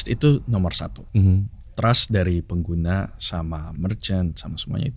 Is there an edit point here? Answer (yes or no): no